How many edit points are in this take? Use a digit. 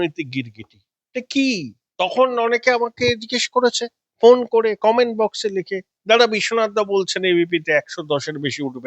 1